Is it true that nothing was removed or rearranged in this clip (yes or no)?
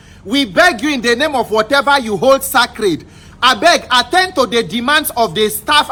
yes